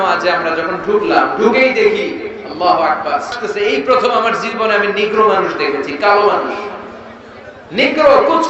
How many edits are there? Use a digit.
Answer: 1